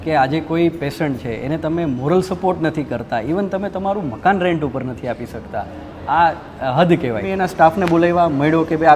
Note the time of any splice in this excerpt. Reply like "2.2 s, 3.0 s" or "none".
7.3 s